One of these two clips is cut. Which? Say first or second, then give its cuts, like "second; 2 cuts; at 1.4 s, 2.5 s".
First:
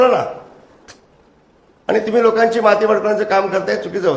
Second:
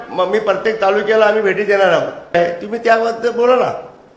second; 1 cut; at 2.3 s